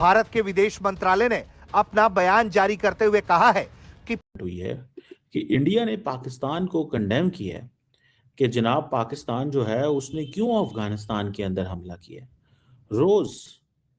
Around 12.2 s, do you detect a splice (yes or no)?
no